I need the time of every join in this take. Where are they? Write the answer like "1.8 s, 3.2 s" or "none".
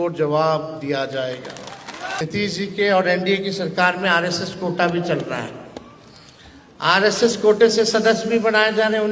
2.2 s